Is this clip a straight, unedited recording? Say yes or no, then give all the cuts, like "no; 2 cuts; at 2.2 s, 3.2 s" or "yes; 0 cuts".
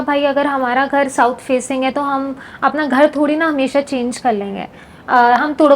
yes; 0 cuts